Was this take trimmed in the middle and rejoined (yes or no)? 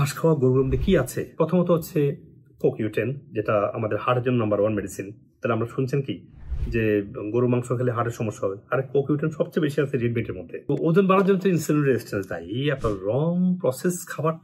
yes